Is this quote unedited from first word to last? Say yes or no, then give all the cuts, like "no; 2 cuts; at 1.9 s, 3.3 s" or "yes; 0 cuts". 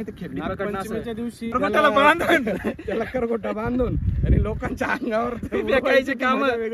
no; 1 cut; at 1.5 s